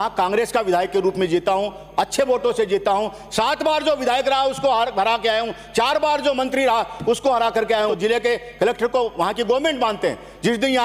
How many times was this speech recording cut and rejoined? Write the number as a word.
one